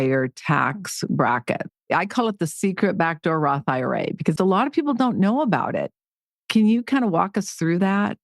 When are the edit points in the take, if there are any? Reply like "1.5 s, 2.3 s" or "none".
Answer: 1.7 s, 4.3 s